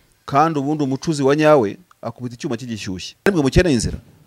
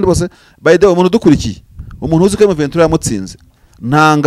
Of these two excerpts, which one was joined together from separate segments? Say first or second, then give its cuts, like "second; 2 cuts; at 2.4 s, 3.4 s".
first; 1 cut; at 3.3 s